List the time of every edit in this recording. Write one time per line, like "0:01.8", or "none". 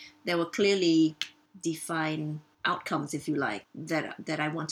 0:02.5
0:03.6